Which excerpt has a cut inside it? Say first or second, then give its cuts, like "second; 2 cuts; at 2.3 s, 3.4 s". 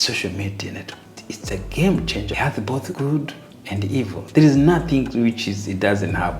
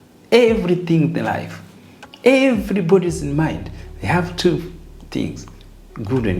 first; 2 cuts; at 1.1 s, 2.4 s